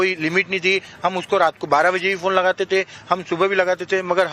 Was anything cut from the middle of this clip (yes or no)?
no